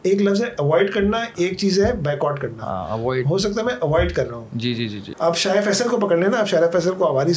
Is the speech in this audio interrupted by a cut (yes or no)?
yes